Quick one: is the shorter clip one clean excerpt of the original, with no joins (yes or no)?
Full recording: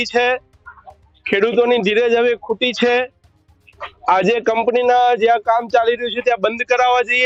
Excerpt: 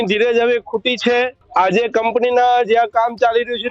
no